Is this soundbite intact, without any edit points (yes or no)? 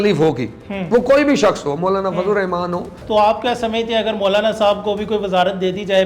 no